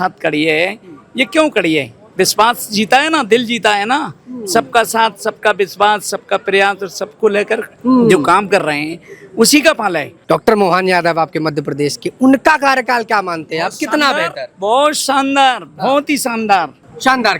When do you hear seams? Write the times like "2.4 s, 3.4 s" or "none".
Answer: 7.7 s, 10.1 s